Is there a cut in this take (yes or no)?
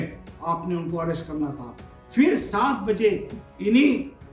no